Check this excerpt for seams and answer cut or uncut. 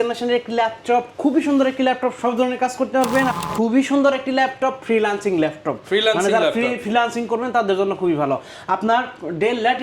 cut